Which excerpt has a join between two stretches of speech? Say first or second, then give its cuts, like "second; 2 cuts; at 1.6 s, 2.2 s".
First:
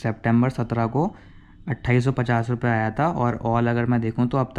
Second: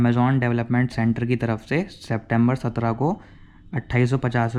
second; 1 cut; at 0.9 s